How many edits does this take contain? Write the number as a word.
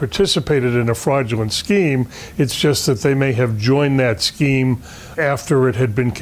zero